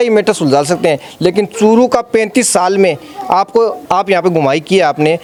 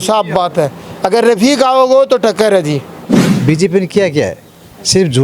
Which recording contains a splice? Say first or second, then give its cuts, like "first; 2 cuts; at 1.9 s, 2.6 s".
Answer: second; 1 cut; at 3.0 s